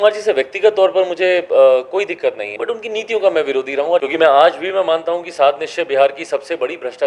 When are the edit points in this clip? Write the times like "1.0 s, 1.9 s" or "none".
2.5 s, 4.0 s